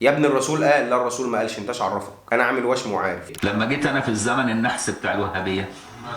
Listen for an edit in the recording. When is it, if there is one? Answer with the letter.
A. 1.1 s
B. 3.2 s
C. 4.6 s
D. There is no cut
B